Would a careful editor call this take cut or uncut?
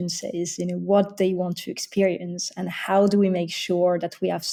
uncut